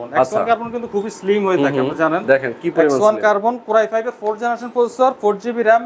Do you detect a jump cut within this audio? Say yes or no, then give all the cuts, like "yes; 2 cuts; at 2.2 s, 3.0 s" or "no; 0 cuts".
no; 0 cuts